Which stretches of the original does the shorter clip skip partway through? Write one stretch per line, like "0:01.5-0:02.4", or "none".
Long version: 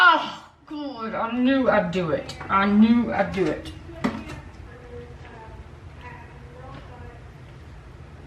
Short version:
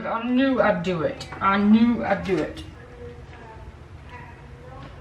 0:03.8-0:04.7

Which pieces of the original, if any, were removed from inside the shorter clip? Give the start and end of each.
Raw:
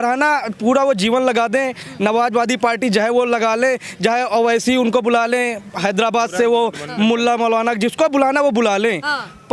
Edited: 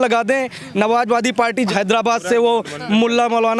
0:02.9-0:05.8

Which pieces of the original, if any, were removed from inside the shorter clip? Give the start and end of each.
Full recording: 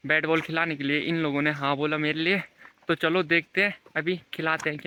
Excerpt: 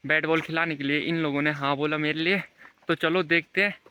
none

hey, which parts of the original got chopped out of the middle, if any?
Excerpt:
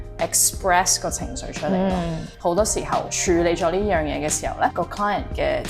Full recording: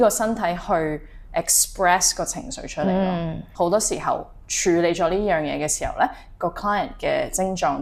0:04.3-0:04.5
0:06.1-0:06.4

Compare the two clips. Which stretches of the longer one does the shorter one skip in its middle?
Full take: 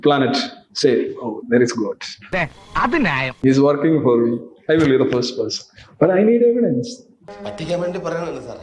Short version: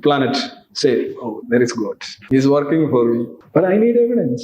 0:02.1-0:03.3
0:04.5-0:05.8

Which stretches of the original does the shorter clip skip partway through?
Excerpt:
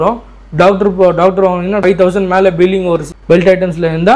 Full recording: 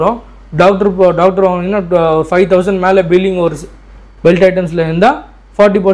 0:01.8-0:02.3
0:03.6-0:04.1

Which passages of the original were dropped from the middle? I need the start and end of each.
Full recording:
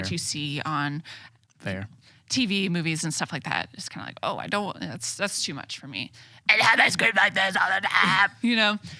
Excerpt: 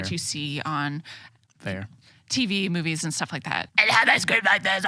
0:03.7-0:06.4

